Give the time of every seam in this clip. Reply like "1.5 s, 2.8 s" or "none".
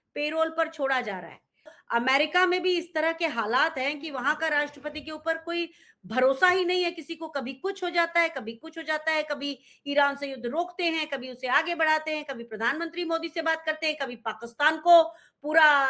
1.8 s